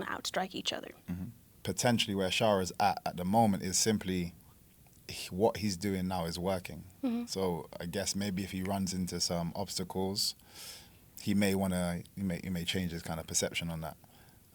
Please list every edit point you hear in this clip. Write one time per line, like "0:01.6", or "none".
0:01.4